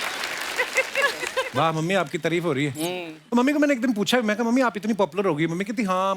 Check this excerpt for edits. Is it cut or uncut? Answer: cut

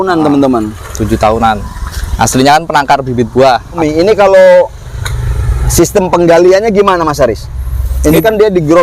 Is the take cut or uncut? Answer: cut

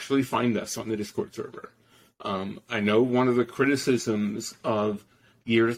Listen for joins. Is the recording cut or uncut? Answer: uncut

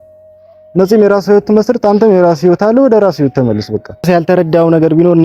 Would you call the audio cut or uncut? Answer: cut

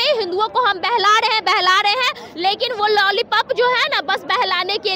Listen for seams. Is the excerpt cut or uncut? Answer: uncut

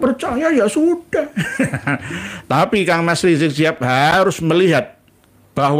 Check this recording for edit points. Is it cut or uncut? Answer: uncut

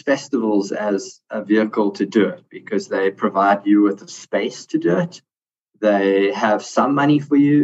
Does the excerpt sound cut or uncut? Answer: uncut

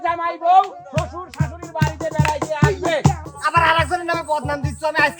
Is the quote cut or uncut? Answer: cut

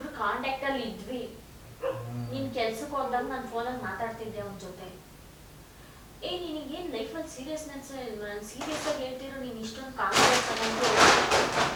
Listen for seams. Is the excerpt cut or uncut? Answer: uncut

